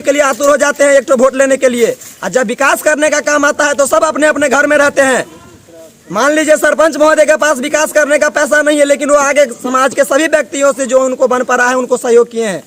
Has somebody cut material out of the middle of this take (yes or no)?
no